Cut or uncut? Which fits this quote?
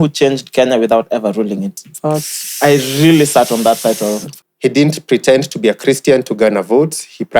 cut